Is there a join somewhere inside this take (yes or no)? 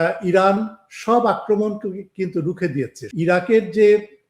yes